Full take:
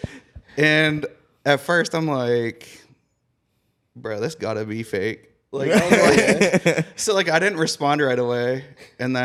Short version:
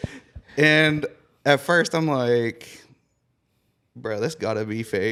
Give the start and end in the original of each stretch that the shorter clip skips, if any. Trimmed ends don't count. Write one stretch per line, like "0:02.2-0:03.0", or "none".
none